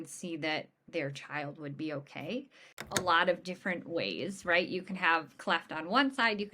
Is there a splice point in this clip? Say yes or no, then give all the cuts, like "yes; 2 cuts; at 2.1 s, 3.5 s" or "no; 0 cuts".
yes; 1 cut; at 3.0 s